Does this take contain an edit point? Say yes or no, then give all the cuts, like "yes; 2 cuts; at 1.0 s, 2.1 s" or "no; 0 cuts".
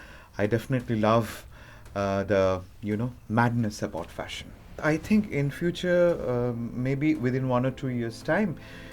yes; 1 cut; at 4.8 s